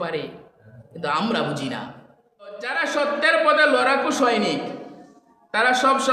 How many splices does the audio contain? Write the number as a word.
one